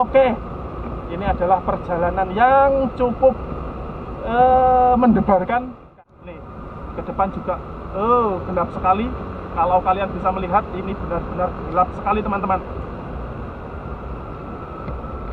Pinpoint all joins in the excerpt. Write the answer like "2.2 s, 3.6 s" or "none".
5.9 s

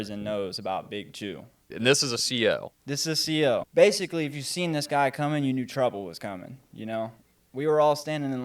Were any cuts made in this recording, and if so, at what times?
1.7 s, 3.7 s

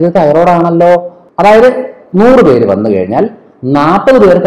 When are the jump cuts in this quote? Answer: 1.2 s

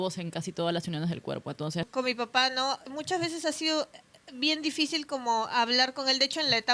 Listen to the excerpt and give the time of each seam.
1.9 s, 2.9 s

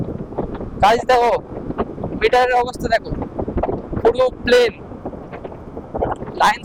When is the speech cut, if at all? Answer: none

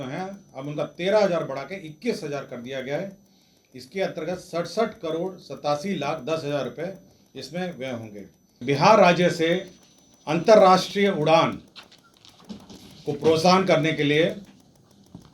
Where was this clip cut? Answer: 8.6 s

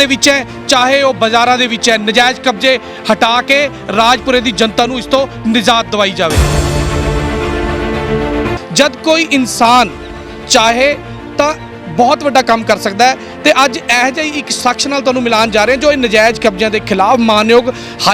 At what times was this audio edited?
6.4 s, 8.6 s

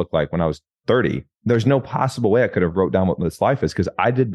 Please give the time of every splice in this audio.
1.3 s

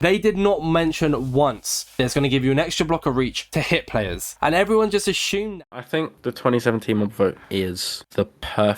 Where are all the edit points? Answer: 5.5 s

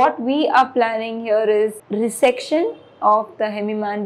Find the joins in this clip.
1.8 s

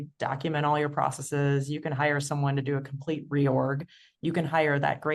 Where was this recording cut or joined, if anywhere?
none

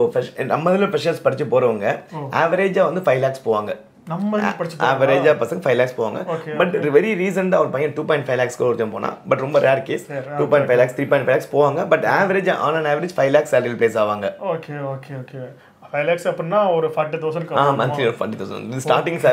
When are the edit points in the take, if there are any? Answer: none

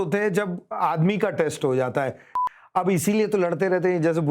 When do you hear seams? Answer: 2.4 s

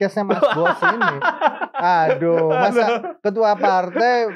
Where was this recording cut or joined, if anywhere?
none

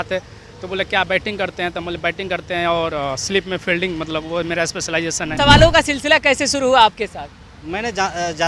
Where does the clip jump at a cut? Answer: 5.3 s

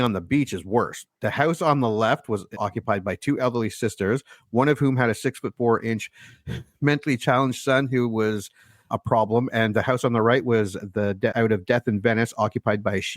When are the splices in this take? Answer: 2.6 s

